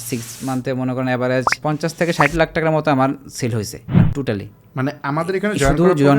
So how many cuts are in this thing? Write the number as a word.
two